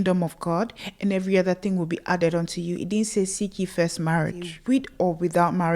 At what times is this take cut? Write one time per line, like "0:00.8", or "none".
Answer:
0:04.5